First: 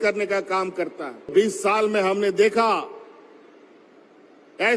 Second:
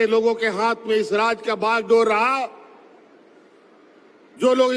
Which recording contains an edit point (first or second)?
first